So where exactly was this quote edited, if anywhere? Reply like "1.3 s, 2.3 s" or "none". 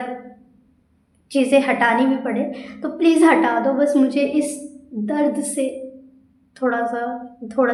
none